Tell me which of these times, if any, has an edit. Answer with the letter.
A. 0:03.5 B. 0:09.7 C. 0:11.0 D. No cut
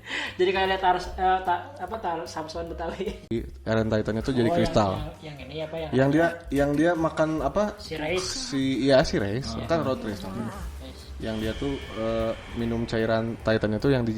A